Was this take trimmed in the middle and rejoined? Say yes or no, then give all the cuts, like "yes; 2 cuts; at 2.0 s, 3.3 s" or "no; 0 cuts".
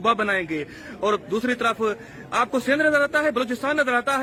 no; 0 cuts